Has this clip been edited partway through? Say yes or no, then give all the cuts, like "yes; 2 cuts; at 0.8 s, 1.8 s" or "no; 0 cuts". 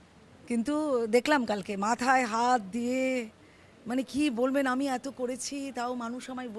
no; 0 cuts